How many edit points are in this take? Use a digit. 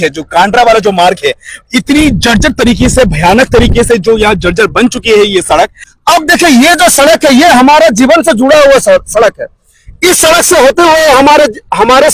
1